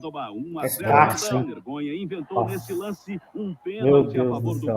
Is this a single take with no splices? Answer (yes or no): no